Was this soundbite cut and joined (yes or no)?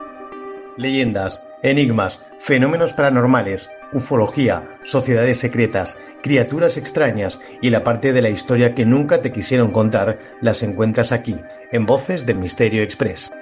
no